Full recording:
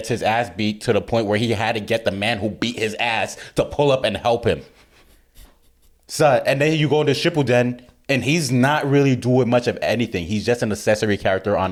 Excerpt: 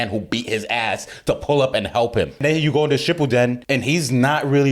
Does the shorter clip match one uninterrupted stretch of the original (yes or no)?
no